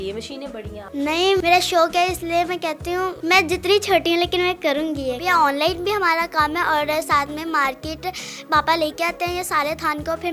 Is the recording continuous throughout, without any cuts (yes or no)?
no